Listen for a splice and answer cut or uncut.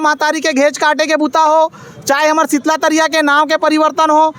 uncut